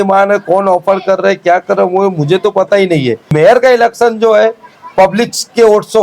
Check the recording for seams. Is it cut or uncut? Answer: cut